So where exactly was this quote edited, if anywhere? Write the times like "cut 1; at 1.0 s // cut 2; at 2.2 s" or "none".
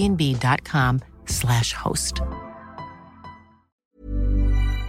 cut 1; at 3.8 s